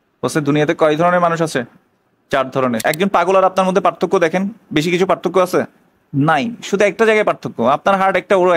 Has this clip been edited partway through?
yes; 1 cut; at 2.8 s

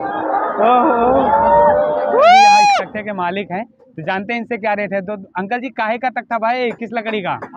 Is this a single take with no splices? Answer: no; 1 cut; at 2.9 s

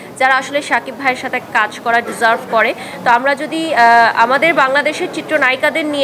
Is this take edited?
no; 0 cuts

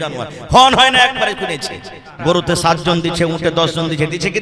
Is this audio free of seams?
no; 1 cut; at 2.1 s

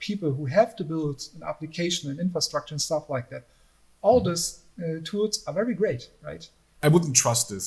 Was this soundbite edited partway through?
yes; 1 cut; at 6.8 s

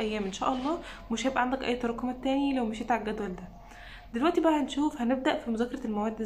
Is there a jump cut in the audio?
no; 0 cuts

